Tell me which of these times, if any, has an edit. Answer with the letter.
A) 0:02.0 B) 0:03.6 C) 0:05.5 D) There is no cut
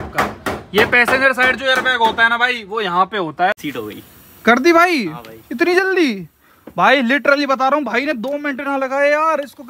B